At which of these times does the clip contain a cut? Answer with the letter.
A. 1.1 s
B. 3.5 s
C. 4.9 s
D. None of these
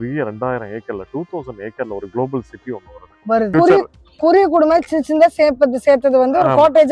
B